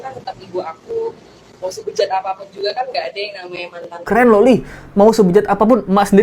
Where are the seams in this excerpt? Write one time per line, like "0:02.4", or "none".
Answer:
0:04.0